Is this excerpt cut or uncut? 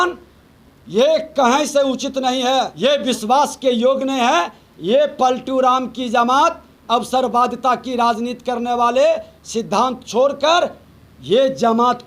cut